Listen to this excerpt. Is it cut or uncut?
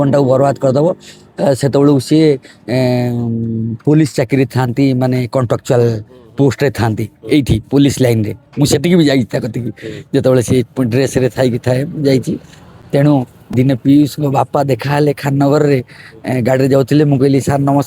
uncut